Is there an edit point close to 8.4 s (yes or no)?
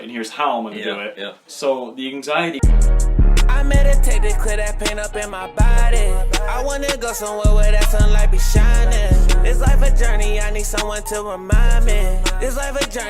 no